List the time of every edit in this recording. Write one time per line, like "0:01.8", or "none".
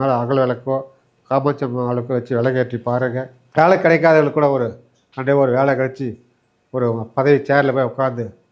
0:03.4